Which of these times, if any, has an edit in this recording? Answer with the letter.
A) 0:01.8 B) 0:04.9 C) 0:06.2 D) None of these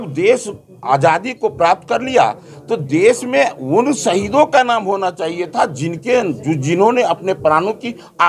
D